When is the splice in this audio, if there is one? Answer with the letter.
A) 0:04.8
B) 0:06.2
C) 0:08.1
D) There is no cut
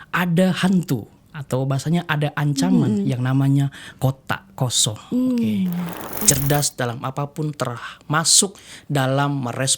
B